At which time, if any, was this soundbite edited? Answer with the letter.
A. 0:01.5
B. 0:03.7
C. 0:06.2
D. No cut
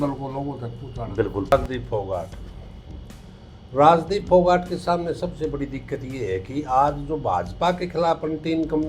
A